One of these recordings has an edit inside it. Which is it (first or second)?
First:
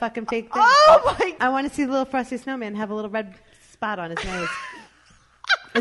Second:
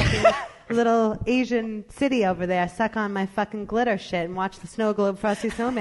first